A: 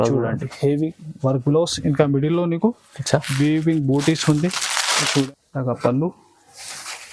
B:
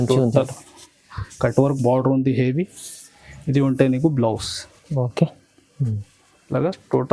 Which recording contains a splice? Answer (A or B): A